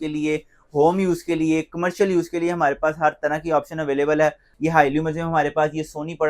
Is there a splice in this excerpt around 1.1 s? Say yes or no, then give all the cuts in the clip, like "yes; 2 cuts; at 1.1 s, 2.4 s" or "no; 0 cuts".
no; 1 cut; at 4.5 s